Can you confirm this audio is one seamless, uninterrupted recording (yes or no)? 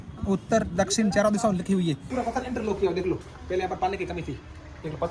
no